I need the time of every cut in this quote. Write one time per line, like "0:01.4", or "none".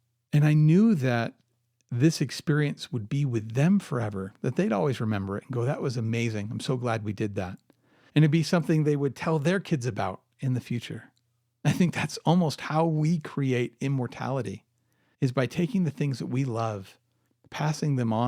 none